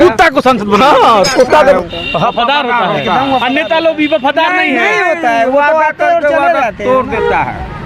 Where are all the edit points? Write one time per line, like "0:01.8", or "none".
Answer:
0:01.6